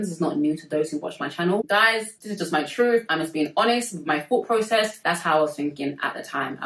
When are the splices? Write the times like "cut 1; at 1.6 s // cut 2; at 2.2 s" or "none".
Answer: cut 1; at 1.6 s